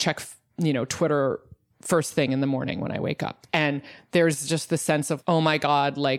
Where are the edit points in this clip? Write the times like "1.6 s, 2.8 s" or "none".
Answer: 3.3 s, 5.2 s